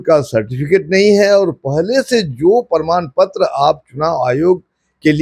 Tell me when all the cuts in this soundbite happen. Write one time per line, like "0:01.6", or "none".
none

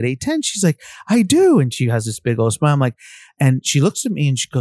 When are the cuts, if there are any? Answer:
0:03.3

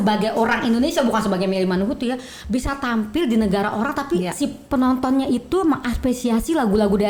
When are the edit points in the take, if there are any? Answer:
none

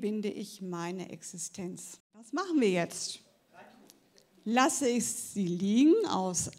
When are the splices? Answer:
0:02.3

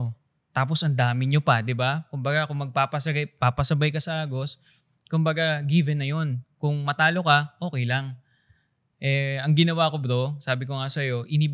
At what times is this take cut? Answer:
none

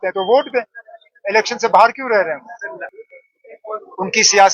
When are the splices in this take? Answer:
0:02.9

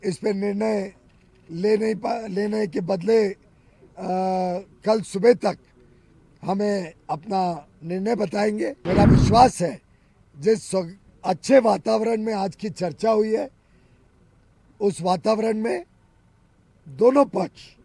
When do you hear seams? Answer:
0:08.8

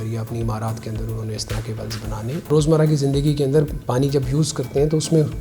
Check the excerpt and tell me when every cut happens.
0:02.5

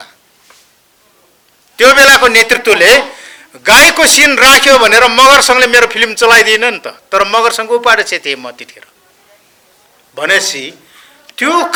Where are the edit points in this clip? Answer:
none

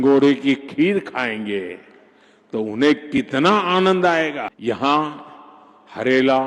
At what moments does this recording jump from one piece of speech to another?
0:04.5

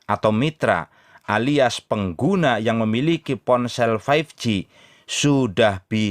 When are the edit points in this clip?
none

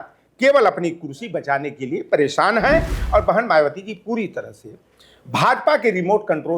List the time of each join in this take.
0:03.0

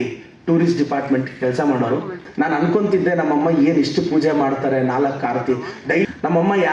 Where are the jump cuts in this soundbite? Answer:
0:02.2
0:06.0

